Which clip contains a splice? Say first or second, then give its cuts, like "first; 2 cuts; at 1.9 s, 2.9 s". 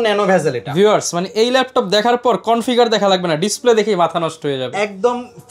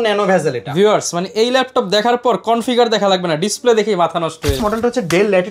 second; 1 cut; at 4.6 s